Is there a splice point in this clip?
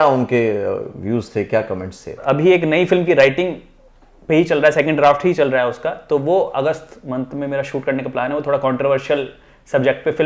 yes; 1 cut; at 2.2 s

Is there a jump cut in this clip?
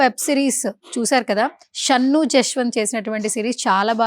yes; 1 cut; at 1.7 s

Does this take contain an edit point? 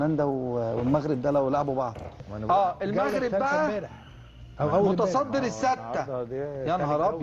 no; 0 cuts

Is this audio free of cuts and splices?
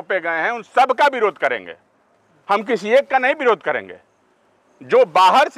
yes; 0 cuts

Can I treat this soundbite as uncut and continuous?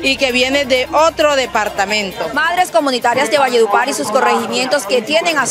no; 1 cut; at 2.3 s

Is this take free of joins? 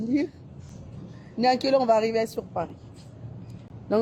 yes; 0 cuts

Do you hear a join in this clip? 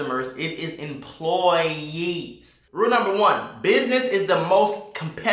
yes; 1 cut; at 2.5 s

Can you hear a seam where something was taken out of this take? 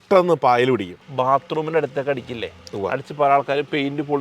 yes; 1 cut; at 1.1 s

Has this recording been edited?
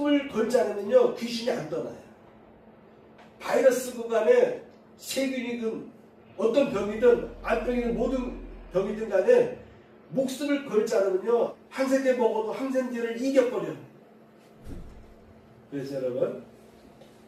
no; 0 cuts

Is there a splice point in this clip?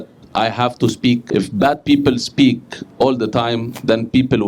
yes; 1 cut; at 1.2 s

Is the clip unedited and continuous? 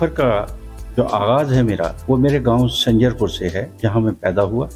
no; 2 cuts; at 2.0 s, 3.7 s

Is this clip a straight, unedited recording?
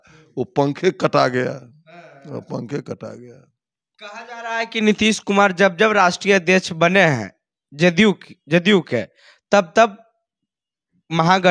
yes; 0 cuts

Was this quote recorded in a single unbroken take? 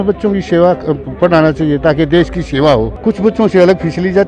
no; 1 cut; at 2.9 s

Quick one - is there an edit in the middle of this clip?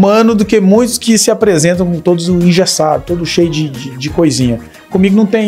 no; 0 cuts

